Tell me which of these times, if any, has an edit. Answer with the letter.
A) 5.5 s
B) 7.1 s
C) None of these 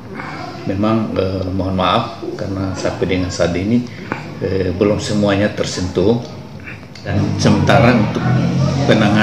B